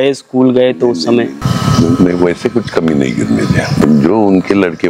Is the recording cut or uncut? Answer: cut